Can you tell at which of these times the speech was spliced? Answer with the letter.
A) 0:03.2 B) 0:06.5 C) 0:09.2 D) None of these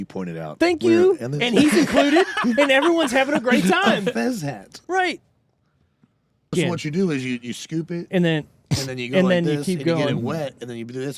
B